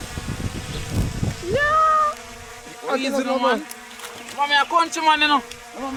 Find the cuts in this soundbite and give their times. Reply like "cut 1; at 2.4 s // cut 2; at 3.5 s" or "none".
none